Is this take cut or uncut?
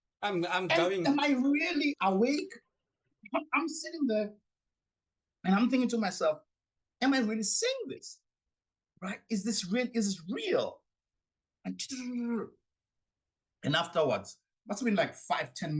cut